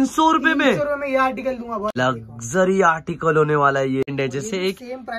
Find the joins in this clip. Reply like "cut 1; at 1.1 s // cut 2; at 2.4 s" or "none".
cut 1; at 1.9 s // cut 2; at 4.1 s